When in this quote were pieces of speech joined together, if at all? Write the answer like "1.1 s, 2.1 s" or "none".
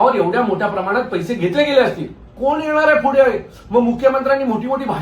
2.3 s